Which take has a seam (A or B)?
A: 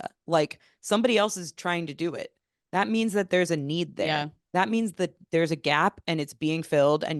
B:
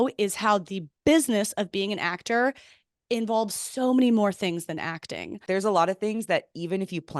B